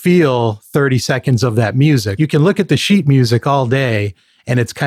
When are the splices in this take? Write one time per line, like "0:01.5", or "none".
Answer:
0:02.1